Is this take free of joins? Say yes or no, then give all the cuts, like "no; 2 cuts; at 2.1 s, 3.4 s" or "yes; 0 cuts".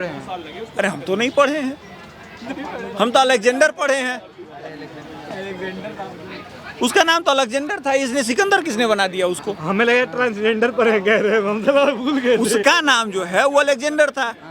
yes; 0 cuts